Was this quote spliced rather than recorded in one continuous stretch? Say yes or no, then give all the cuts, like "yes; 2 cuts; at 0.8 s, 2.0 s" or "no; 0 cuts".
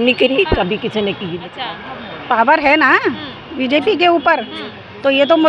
yes; 1 cut; at 1.5 s